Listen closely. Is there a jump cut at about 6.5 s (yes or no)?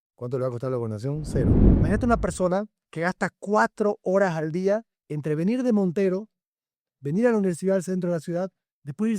no